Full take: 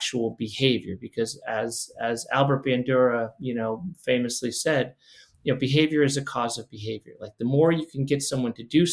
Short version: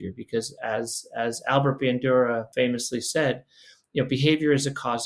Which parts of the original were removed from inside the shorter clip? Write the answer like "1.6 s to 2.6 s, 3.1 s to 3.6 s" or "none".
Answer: 3.3 s to 4.0 s